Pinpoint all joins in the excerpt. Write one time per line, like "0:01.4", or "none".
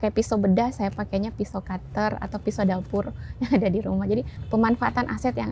0:04.4